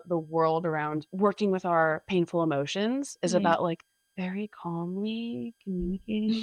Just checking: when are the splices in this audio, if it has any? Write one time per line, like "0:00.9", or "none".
0:01.1